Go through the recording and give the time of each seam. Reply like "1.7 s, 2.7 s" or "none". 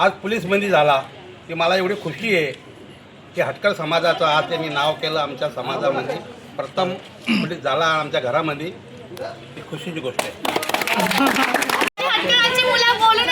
11.9 s